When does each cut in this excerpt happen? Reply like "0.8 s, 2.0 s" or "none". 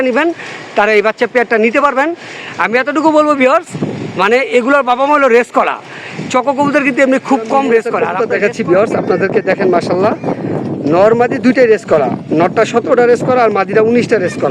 8.0 s

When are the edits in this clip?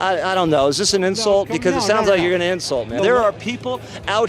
3.0 s

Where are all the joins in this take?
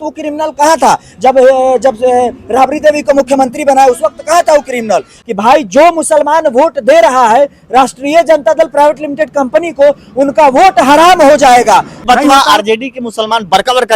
5.2 s, 12.0 s

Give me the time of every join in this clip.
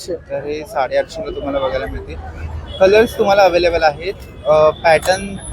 none

